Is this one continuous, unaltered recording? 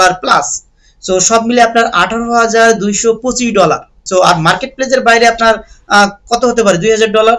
no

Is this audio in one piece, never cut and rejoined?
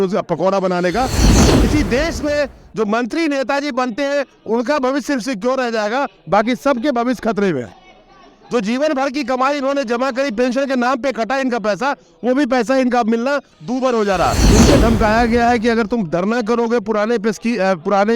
no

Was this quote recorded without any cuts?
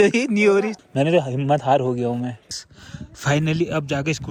yes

